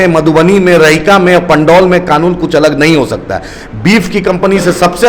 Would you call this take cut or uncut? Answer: uncut